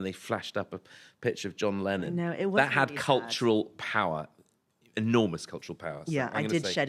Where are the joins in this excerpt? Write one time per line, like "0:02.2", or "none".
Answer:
none